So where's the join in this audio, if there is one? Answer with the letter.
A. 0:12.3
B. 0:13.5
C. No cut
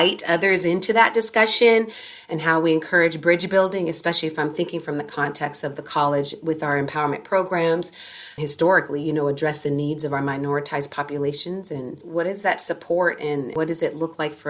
B